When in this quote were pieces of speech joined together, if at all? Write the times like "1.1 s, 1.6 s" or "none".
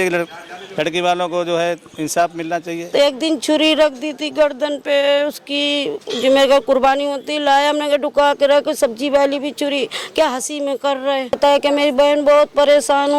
2.9 s, 11.4 s